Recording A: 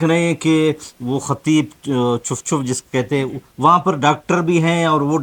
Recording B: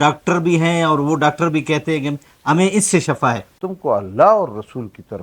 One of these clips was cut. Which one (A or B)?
B